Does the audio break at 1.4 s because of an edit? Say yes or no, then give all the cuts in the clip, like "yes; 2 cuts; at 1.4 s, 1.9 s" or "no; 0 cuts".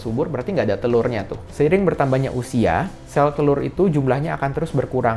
yes; 1 cut; at 1.4 s